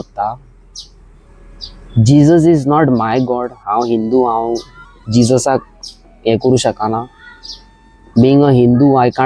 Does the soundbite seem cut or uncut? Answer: uncut